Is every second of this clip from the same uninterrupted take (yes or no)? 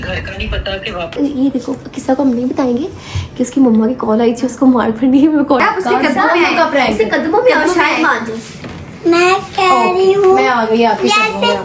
no